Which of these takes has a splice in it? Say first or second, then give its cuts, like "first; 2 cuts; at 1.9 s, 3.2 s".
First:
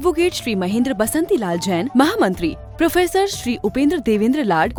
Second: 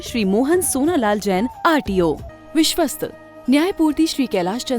second; 1 cut; at 2.3 s